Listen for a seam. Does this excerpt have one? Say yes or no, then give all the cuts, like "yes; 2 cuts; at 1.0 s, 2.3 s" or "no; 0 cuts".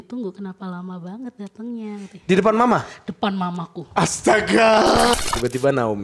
yes; 1 cut; at 5.1 s